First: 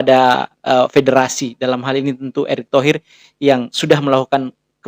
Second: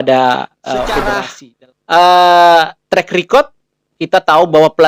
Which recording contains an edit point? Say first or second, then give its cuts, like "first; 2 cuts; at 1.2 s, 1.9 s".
second; 1 cut; at 1.1 s